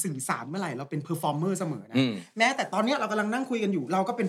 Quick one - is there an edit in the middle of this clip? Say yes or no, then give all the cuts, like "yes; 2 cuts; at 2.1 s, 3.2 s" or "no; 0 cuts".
no; 0 cuts